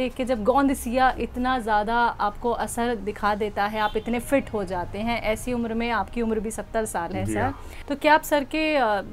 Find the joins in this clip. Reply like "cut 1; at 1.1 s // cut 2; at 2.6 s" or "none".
none